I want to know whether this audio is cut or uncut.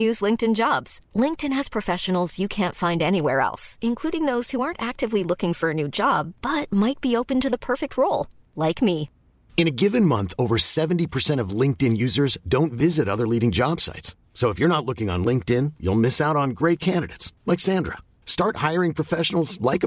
uncut